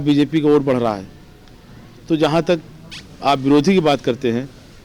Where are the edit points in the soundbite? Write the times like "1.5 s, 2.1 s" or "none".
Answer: none